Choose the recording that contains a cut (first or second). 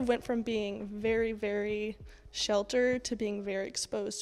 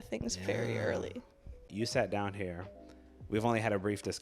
second